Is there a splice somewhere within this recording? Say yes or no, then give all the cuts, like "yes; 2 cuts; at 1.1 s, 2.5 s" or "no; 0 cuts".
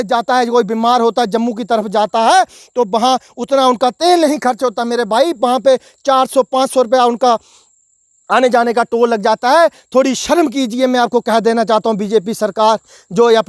no; 0 cuts